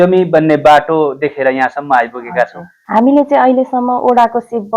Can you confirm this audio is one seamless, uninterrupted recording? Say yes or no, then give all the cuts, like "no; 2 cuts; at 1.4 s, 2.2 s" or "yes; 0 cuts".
no; 1 cut; at 3.1 s